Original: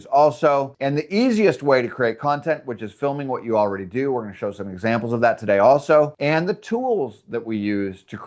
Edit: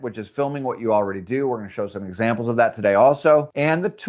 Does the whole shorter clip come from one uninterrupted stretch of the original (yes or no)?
yes